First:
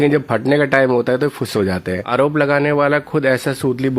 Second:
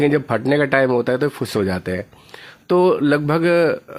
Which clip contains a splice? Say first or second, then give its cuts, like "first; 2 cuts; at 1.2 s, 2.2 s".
first; 1 cut; at 2.0 s